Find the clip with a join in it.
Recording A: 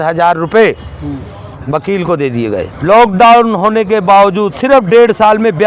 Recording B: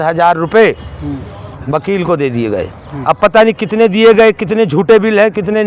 A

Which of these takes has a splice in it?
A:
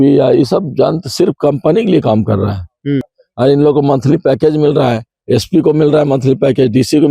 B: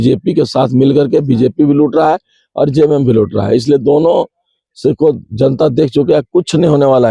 A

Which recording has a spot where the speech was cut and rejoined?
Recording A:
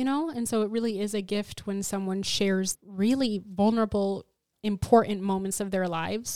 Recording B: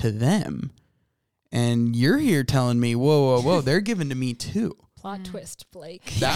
A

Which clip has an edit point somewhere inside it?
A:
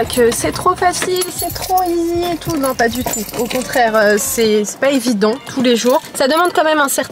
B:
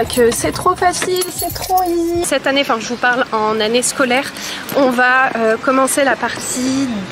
B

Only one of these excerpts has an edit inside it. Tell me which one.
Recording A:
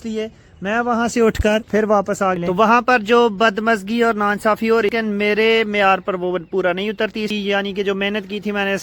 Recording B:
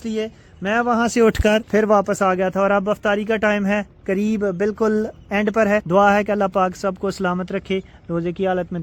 A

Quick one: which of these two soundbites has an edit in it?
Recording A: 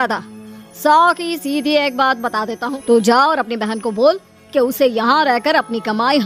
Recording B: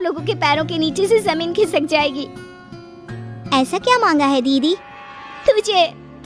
A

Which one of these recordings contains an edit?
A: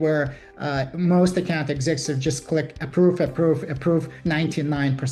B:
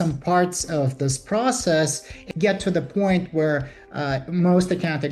B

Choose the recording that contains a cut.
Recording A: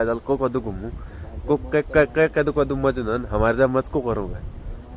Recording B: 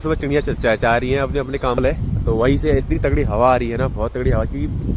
B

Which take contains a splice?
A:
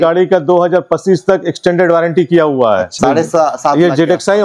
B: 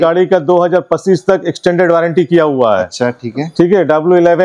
A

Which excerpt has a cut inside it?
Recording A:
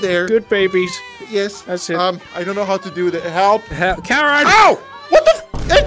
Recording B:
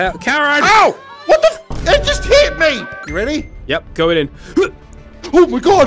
B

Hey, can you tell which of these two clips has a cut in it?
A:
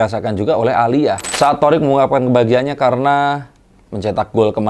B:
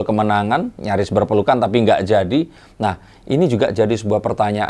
A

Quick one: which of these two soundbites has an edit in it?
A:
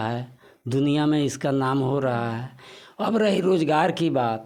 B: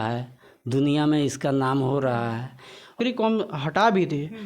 B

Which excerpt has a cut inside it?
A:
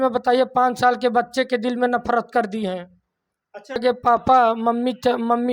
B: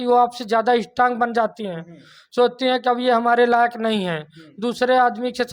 A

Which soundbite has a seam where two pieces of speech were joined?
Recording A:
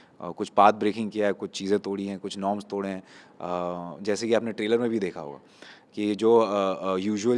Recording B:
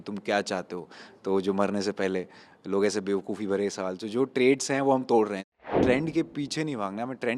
B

